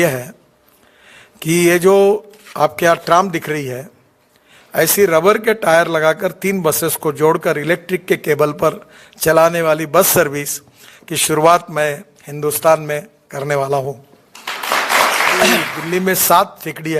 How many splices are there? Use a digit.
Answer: 1